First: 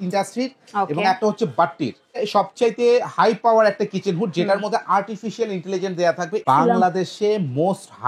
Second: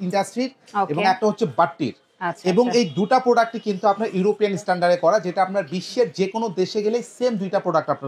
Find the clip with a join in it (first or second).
first